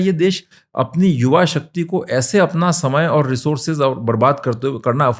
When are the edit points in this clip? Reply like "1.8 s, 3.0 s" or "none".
none